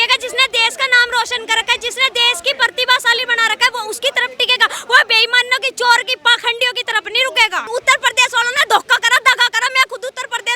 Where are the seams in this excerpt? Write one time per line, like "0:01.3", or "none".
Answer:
0:07.7